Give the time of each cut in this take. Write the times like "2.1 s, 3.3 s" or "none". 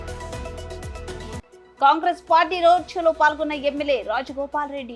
1.4 s